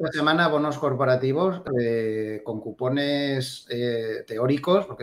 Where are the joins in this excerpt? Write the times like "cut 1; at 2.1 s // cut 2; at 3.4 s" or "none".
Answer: cut 1; at 1.7 s